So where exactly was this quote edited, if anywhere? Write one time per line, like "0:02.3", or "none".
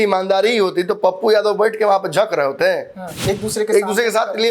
0:03.1